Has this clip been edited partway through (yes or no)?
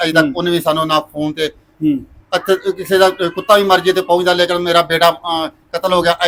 no